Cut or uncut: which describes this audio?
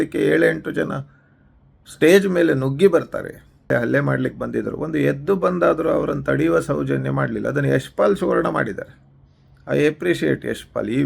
cut